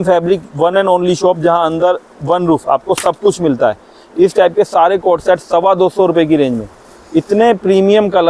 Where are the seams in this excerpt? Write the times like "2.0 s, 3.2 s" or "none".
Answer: none